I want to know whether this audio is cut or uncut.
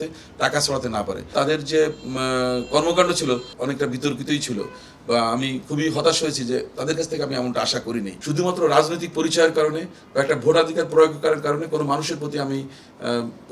cut